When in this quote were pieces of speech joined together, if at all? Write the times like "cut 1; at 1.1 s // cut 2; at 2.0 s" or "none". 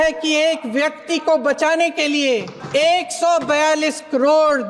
cut 1; at 2.6 s